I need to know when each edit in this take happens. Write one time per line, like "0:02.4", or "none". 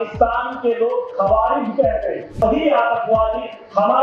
0:02.4